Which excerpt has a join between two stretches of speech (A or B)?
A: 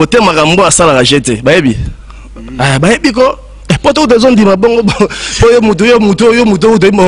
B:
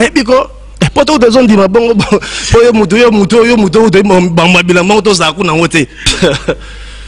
B